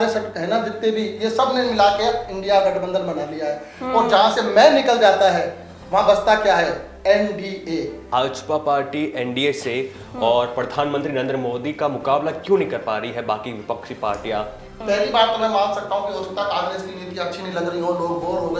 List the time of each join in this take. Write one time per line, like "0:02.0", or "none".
0:08.0
0:14.7